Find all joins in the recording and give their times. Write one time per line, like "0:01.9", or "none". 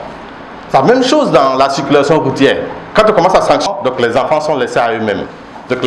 0:03.7